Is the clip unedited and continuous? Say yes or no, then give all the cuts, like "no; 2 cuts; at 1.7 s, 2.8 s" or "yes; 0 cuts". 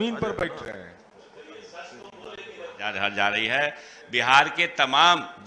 no; 1 cut; at 2.9 s